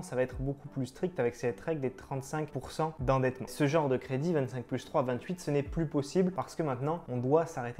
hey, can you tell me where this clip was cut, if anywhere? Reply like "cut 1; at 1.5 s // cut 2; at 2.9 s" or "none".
cut 1; at 3.4 s